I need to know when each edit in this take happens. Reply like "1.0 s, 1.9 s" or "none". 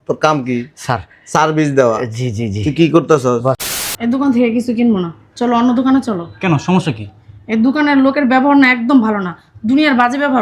3.6 s